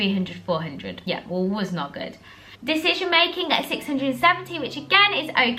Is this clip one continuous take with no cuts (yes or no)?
yes